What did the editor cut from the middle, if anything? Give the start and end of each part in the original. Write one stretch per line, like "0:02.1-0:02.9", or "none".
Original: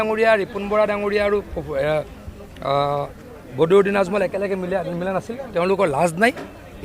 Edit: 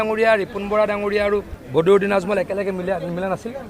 0:01.6-0:03.4